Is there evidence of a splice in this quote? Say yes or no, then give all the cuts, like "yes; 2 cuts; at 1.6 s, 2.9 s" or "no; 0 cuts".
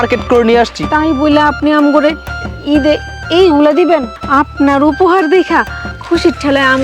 yes; 1 cut; at 4.1 s